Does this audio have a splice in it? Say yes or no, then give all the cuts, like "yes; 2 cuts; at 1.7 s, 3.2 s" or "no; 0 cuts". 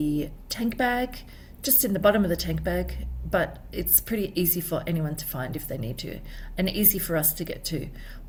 no; 0 cuts